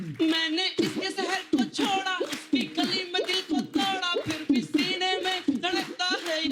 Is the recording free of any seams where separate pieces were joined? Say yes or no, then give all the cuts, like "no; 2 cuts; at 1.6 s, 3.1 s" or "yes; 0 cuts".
yes; 0 cuts